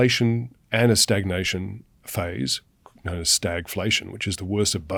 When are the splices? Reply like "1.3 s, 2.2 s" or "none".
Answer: none